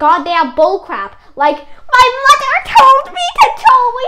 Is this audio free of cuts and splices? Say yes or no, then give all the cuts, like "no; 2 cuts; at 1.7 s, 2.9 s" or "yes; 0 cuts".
yes; 0 cuts